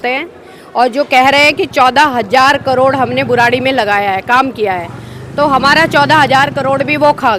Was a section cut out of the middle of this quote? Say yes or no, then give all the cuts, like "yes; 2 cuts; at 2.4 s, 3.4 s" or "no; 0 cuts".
no; 0 cuts